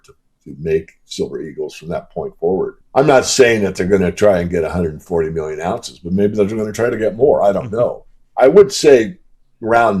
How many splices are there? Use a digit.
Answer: 1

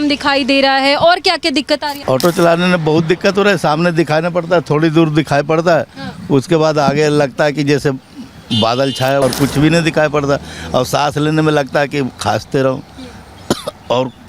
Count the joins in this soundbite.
2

